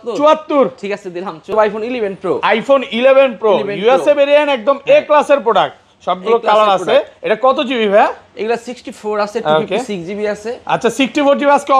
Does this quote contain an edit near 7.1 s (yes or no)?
no